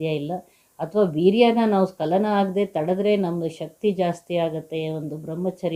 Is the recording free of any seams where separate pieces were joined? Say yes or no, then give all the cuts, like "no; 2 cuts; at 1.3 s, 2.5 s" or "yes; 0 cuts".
yes; 0 cuts